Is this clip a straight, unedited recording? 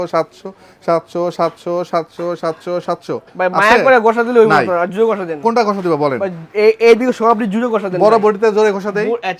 yes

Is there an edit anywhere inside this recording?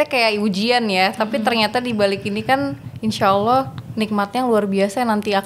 no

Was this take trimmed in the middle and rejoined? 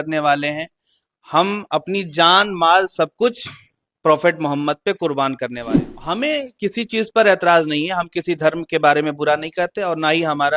yes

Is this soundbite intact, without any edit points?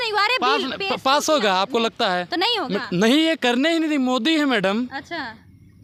yes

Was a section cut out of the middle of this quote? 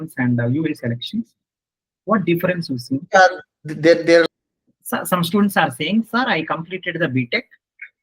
yes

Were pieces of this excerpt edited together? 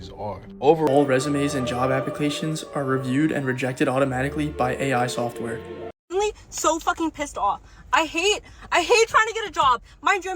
yes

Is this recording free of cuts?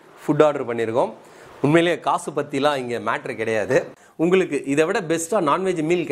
no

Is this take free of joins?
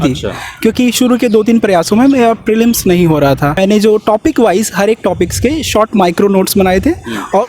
no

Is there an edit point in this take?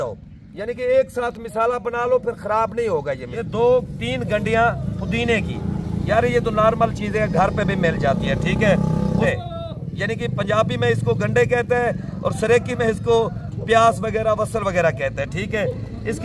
yes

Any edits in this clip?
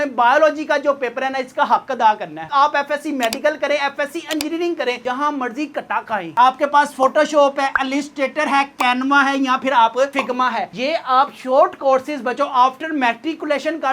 yes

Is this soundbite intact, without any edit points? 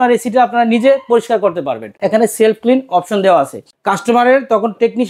no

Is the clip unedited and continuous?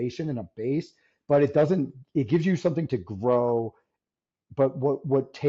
yes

